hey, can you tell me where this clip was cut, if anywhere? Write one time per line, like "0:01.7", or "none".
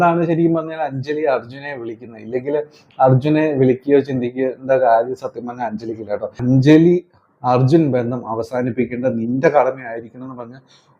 0:06.4